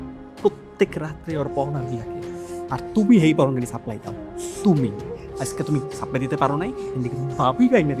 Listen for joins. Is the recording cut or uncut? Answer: uncut